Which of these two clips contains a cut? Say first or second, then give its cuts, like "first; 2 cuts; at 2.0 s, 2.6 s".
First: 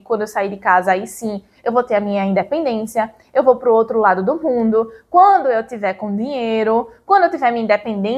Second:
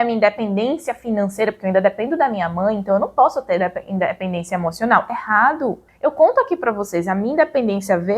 second; 1 cut; at 5.9 s